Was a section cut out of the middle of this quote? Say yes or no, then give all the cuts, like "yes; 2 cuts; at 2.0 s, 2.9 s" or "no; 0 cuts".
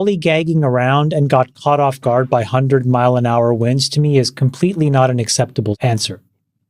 no; 0 cuts